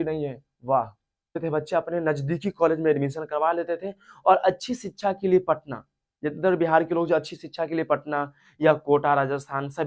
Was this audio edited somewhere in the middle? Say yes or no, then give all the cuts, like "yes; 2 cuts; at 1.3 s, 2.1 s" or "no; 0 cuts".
yes; 1 cut; at 1.4 s